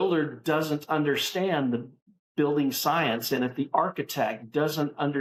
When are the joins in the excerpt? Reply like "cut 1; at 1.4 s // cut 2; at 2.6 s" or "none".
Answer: none